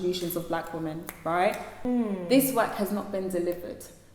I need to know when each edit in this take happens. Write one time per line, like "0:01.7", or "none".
0:01.9